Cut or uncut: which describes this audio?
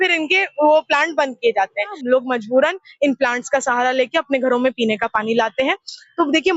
cut